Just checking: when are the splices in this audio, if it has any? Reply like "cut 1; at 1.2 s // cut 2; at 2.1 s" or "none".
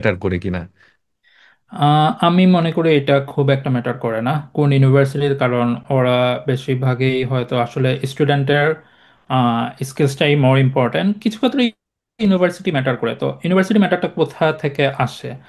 none